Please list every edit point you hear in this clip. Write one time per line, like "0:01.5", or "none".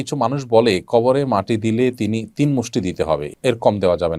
0:03.3